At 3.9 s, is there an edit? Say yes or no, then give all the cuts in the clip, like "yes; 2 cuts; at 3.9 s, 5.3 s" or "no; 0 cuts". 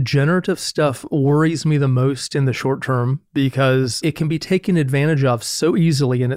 yes; 1 cut; at 3.9 s